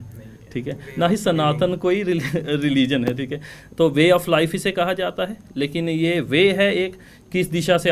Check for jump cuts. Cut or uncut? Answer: uncut